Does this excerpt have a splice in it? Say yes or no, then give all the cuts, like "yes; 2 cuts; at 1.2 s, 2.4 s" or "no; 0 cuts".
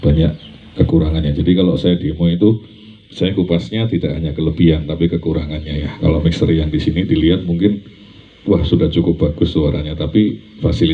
no; 0 cuts